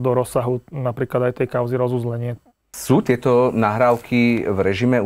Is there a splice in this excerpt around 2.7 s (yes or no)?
yes